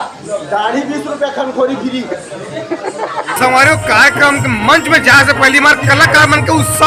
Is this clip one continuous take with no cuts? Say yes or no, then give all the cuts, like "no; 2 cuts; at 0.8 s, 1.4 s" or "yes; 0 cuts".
no; 1 cut; at 3.4 s